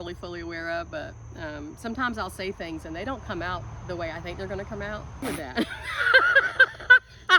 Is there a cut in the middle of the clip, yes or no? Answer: yes